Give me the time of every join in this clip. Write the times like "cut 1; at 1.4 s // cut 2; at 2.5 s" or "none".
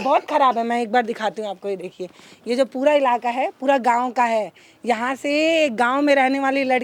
none